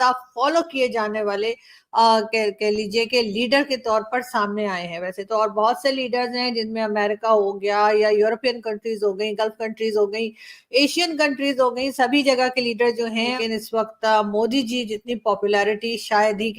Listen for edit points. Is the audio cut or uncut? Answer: cut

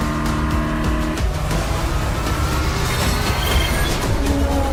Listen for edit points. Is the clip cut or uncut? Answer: uncut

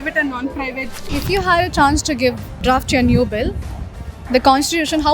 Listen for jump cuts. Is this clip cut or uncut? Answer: cut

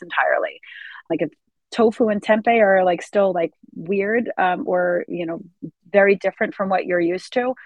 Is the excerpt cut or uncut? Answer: cut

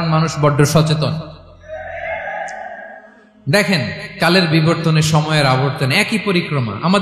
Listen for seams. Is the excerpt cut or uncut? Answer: uncut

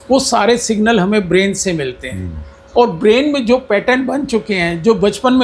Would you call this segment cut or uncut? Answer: uncut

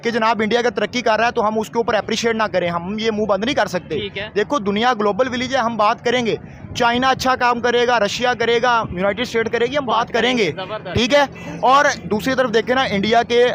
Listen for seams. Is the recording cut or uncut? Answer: uncut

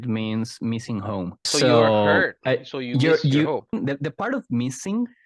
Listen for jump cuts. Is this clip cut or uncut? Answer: cut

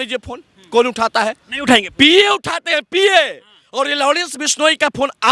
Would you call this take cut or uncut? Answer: uncut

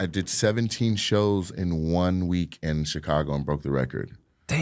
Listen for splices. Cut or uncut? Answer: uncut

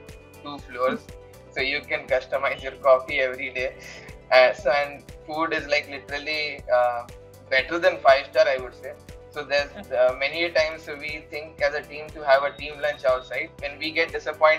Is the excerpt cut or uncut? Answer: uncut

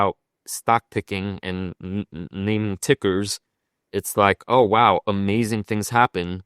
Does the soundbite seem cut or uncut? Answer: uncut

